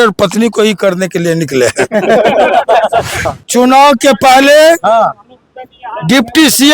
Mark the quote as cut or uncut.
cut